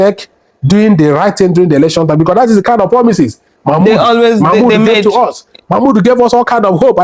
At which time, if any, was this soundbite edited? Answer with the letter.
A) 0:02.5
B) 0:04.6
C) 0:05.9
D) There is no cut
D